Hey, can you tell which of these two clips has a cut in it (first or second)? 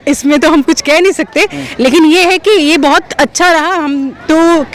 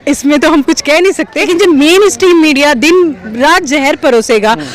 second